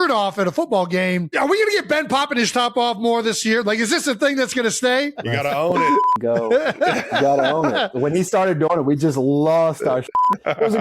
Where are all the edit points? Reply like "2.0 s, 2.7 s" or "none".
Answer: 1.3 s, 5.1 s, 7.9 s